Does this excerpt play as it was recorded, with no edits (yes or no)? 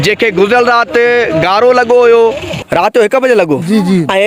no